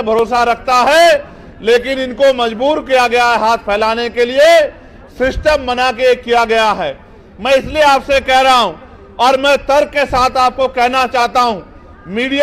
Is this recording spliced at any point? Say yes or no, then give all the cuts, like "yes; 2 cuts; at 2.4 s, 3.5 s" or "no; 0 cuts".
no; 0 cuts